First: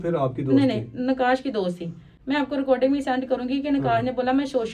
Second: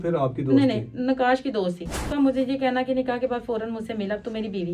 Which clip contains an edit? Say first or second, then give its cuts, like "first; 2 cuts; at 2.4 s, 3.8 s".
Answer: second; 1 cut; at 2.0 s